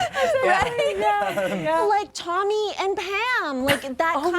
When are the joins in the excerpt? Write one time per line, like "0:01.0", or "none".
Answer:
0:01.8